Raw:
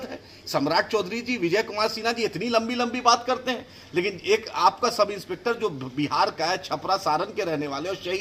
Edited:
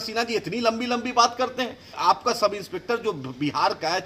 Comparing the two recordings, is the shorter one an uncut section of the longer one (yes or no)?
no